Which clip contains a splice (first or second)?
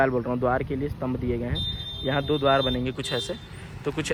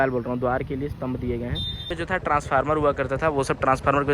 second